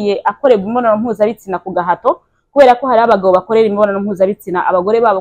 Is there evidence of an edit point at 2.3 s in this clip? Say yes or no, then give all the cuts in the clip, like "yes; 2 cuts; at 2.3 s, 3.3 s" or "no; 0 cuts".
no; 0 cuts